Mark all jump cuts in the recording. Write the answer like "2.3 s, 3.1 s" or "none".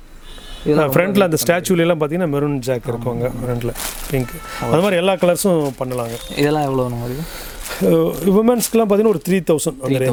none

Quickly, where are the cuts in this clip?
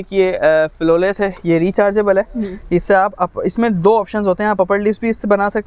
none

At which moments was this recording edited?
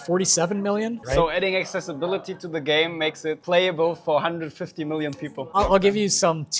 1.0 s, 3.4 s, 5.6 s

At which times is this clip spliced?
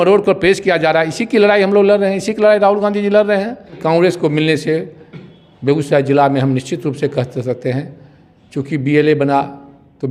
3.8 s

